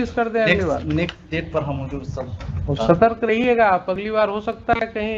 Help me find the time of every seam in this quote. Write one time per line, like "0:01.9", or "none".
none